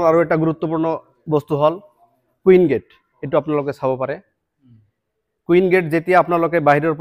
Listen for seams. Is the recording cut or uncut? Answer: uncut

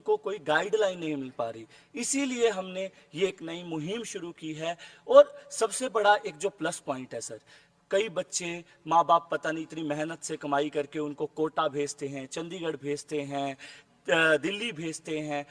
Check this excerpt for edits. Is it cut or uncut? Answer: uncut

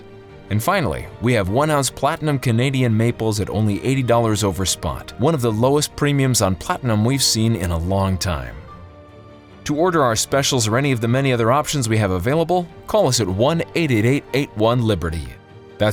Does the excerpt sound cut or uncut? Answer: uncut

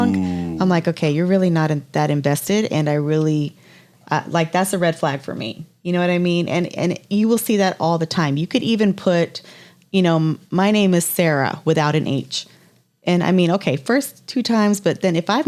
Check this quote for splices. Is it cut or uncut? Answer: uncut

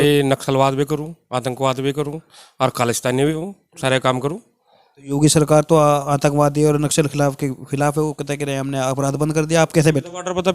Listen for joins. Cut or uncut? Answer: uncut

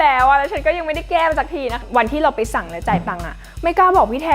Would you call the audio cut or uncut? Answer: cut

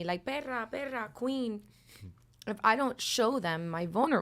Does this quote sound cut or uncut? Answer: uncut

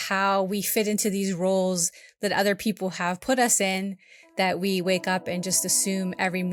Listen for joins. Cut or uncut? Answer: uncut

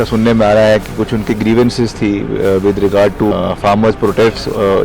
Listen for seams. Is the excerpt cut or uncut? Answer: cut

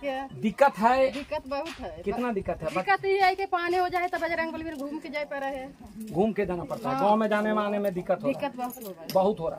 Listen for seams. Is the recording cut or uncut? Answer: uncut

